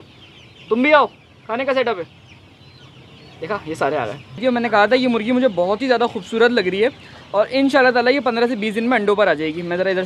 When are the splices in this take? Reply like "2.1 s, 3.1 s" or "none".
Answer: 4.4 s